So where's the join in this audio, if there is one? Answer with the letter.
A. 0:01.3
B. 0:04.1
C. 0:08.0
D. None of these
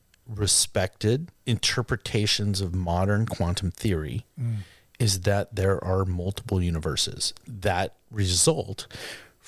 A